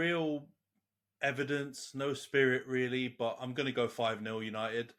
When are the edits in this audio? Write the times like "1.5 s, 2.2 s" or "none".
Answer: none

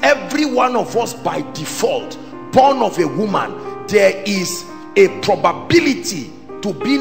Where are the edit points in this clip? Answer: none

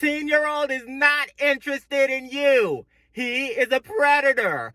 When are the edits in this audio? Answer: none

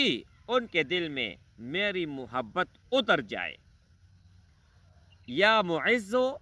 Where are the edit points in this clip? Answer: none

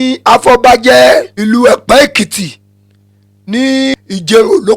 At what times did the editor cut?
1.3 s, 3.9 s

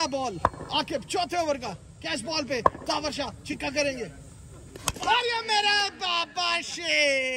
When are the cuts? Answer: none

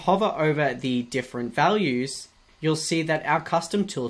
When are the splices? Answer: none

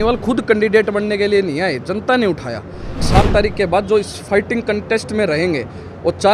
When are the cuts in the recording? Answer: 3.0 s

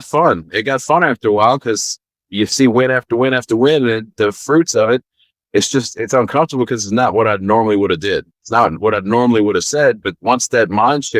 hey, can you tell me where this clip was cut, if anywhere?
none

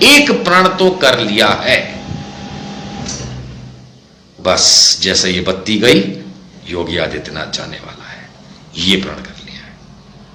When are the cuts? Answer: none

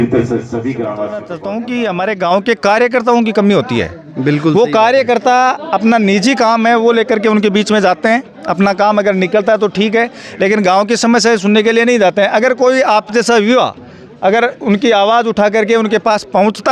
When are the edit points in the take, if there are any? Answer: 1.2 s

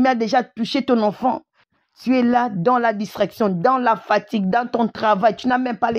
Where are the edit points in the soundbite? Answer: 1.5 s

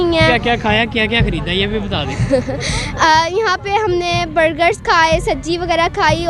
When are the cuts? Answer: none

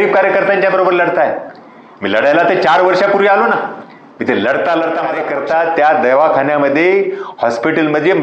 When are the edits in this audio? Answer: 5.2 s

